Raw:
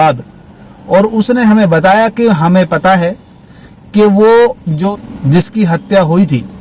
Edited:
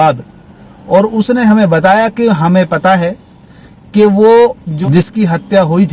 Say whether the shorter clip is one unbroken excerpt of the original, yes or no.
no